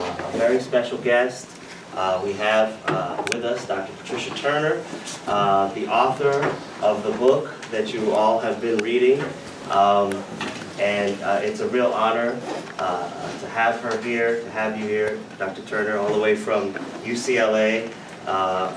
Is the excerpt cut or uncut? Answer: uncut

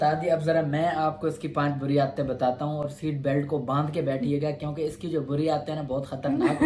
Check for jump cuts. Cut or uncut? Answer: uncut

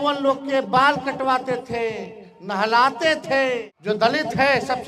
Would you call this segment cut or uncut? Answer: cut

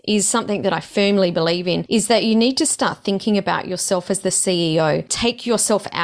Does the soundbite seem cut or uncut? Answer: cut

